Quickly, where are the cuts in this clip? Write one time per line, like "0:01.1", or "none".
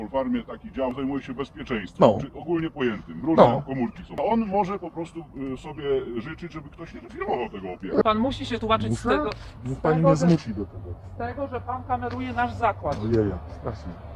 0:00.9
0:04.2
0:08.0